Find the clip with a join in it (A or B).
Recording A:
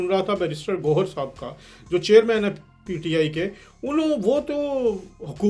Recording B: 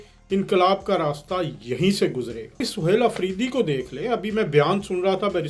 B